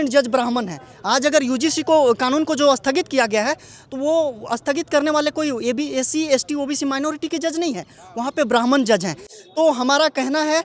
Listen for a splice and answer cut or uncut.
uncut